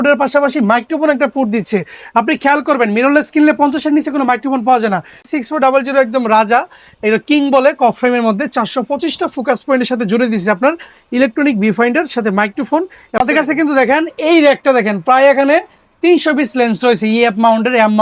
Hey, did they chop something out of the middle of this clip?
yes; 2 cuts; at 5.2 s, 13.0 s

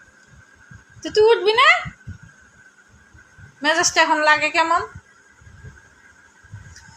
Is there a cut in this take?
no; 0 cuts

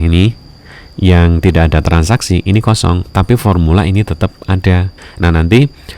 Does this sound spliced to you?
yes; 1 cut; at 4.9 s

